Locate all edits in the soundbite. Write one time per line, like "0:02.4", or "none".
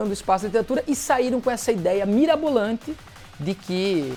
none